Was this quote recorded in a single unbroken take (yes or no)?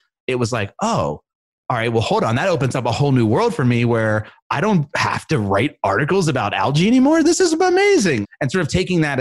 no